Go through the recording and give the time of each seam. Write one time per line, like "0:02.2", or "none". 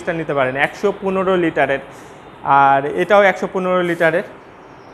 none

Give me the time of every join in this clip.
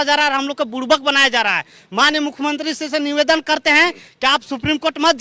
none

